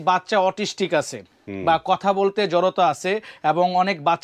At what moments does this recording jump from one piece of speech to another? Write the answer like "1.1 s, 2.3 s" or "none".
none